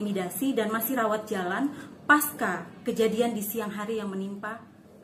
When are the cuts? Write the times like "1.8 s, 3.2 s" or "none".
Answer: none